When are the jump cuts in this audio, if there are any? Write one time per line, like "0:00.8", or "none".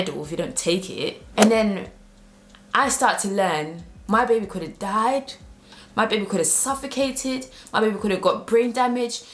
0:01.2